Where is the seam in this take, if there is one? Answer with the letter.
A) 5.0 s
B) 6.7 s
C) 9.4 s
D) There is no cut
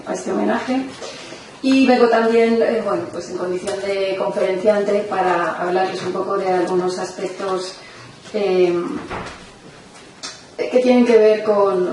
D